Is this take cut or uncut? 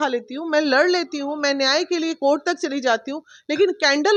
uncut